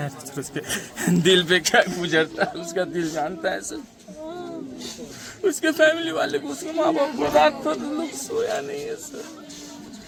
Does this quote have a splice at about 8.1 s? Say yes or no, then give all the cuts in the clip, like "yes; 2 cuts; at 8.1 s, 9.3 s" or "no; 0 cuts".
no; 0 cuts